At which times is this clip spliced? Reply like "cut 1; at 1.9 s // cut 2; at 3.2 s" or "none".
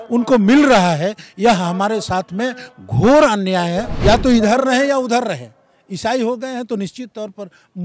cut 1; at 3.9 s